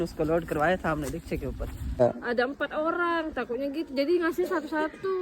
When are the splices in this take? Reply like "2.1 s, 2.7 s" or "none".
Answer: 1.9 s